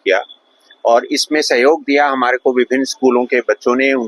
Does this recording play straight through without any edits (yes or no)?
yes